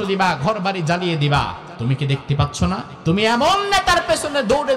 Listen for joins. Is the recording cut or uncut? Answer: cut